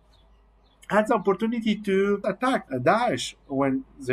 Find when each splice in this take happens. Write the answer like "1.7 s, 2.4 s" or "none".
2.6 s